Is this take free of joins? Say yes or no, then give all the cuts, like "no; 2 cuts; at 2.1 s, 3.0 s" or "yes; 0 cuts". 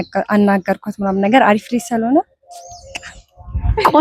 yes; 0 cuts